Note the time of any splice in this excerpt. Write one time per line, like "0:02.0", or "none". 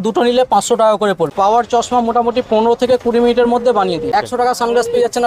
0:01.3
0:04.1